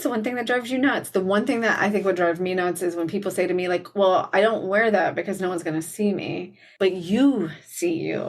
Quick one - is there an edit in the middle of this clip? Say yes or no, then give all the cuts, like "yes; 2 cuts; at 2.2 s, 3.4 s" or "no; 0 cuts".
yes; 1 cut; at 6.7 s